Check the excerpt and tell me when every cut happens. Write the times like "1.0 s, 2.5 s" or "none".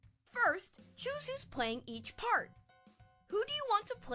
none